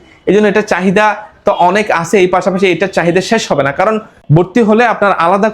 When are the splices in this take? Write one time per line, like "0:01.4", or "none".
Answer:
0:04.1